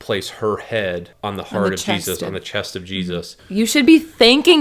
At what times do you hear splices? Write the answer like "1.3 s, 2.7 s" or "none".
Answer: 1.1 s, 3.4 s